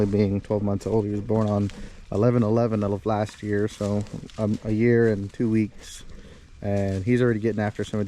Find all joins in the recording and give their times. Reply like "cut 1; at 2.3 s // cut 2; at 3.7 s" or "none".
none